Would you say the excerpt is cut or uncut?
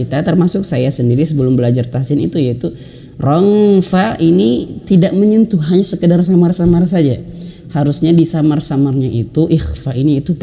uncut